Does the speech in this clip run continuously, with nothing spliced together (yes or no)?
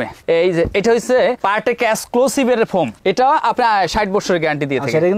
no